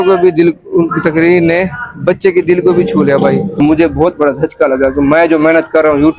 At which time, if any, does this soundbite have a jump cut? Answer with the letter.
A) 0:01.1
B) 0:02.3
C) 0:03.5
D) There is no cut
C